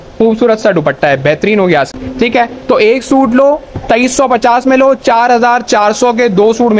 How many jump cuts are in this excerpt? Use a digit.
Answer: 1